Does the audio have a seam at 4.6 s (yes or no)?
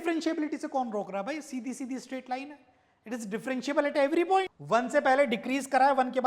yes